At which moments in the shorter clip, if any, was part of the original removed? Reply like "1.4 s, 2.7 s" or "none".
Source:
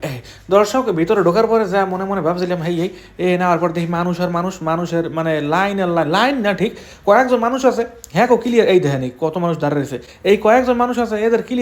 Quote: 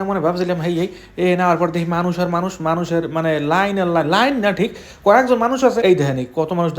5.8 s